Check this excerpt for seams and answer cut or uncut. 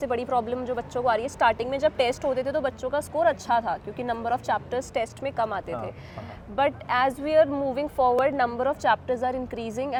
uncut